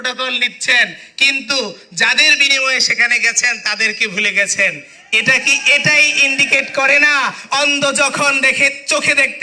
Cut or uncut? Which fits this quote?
uncut